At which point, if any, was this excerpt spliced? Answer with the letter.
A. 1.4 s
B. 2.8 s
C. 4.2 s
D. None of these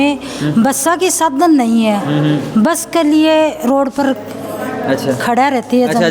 D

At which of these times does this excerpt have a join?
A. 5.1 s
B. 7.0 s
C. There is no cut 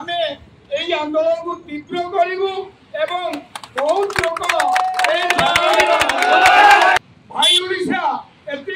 B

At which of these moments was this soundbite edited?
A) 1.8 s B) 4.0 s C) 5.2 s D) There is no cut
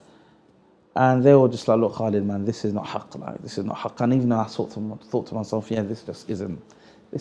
D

